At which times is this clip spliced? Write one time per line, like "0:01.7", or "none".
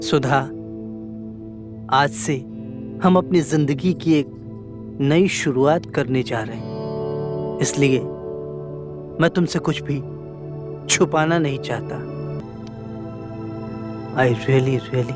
0:12.4